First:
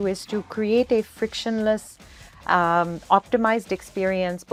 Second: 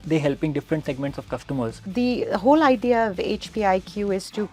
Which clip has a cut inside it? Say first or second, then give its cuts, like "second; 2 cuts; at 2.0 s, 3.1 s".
second; 1 cut; at 1.8 s